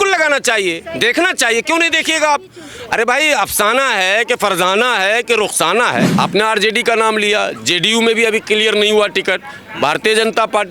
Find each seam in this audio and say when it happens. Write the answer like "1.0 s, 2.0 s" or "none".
6.1 s